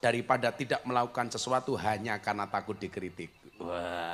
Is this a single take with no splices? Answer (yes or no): yes